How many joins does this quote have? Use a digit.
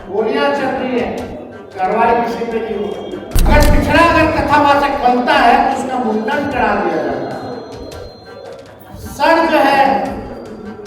1